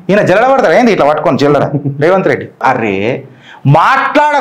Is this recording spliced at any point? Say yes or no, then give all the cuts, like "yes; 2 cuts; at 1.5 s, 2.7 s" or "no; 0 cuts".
yes; 1 cut; at 2.6 s